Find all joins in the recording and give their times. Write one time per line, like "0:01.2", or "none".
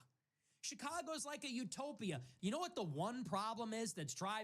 0:02.3